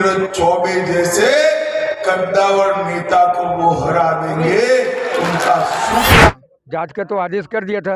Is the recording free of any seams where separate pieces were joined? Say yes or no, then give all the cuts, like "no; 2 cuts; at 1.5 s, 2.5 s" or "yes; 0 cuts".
no; 1 cut; at 6.3 s